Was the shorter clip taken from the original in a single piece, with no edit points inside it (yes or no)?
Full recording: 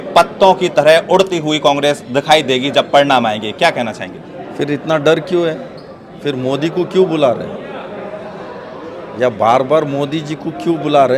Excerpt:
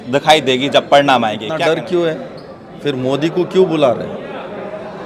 no